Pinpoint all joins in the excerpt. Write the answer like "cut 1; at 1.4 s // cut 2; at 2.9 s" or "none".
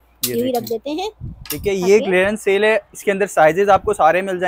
none